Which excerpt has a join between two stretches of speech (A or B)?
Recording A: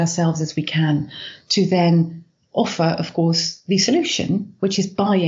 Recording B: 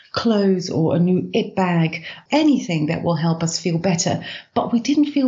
B